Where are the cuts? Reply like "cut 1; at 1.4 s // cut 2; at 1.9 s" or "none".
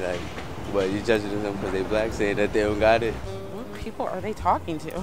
none